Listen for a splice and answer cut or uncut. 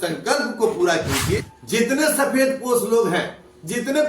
cut